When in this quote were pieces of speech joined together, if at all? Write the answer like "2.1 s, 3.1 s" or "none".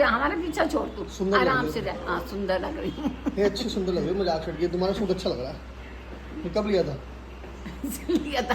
none